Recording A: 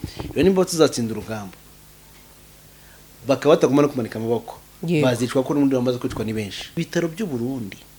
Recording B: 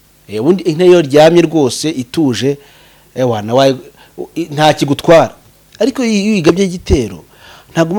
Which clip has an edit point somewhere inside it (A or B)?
A